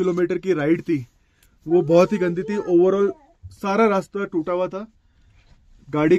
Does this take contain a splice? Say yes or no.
no